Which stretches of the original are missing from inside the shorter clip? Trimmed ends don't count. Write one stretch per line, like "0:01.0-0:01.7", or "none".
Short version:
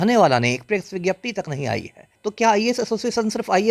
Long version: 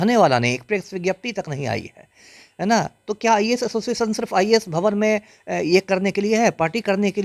0:02.1-0:03.0